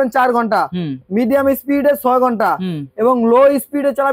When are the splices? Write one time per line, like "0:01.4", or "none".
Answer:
none